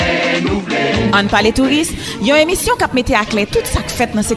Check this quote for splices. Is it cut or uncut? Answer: uncut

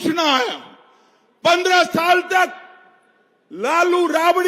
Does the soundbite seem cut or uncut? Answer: uncut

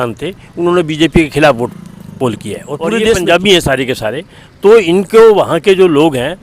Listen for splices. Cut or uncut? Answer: cut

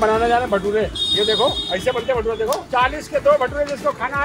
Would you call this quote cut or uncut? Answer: cut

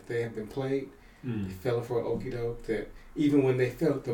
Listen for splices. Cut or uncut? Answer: uncut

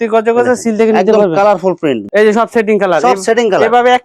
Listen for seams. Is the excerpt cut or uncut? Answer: cut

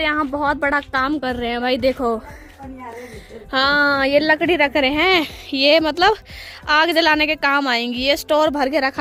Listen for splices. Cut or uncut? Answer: uncut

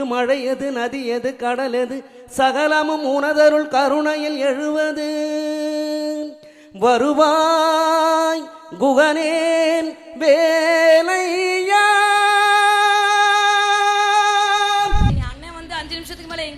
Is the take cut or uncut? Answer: cut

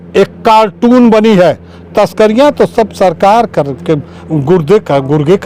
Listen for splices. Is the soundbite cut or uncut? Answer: uncut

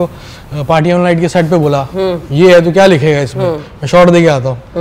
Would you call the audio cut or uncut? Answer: uncut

